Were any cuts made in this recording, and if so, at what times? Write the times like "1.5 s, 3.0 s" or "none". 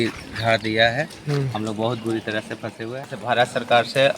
3.1 s